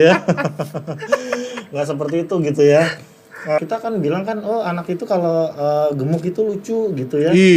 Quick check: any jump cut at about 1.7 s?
no; 1 cut; at 3.6 s

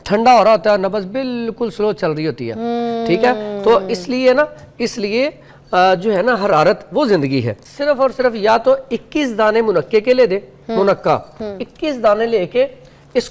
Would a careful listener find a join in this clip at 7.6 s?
yes; 1 cut; at 7.6 s

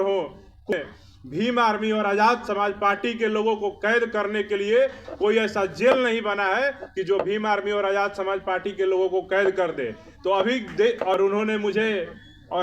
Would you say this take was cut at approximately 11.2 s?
yes; 2 cuts; at 0.7 s, 11.2 s

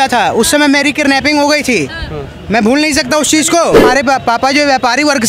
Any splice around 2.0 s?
no; 1 cut; at 3.9 s

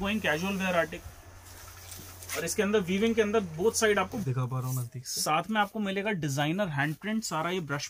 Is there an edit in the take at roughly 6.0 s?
no; 2 cuts; at 0.9 s, 4.2 s

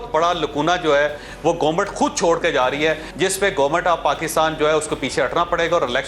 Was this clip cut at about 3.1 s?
yes; 1 cut; at 3.1 s

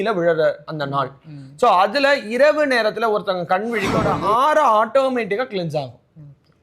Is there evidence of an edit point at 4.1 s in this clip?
yes; 1 cut; at 4.1 s

